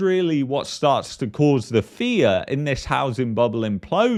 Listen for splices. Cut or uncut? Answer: uncut